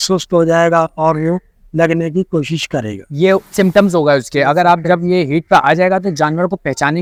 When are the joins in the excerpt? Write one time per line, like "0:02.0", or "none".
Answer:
none